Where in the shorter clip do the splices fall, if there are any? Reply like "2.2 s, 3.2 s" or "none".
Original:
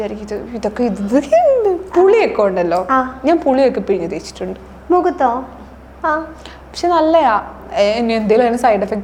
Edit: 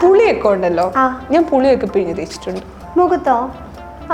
none